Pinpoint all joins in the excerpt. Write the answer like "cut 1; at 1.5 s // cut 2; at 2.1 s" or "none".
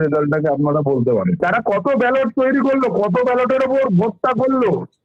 cut 1; at 1.4 s